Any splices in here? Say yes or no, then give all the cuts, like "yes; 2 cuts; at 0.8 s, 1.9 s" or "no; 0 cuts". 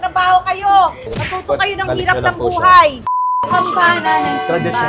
yes; 1 cut; at 3.4 s